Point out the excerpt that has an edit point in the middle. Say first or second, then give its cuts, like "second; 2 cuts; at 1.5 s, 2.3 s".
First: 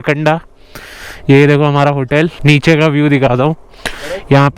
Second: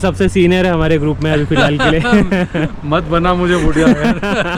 first; 1 cut; at 2.4 s